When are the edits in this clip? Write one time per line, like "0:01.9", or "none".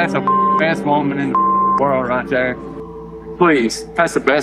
none